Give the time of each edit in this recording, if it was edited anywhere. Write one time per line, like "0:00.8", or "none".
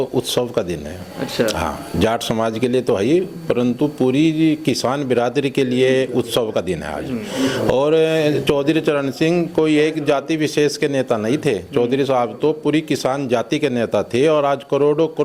none